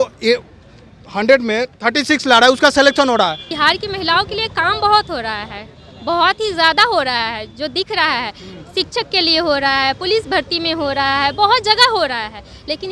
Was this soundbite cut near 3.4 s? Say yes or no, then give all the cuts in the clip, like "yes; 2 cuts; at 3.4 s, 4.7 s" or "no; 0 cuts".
yes; 1 cut; at 3.4 s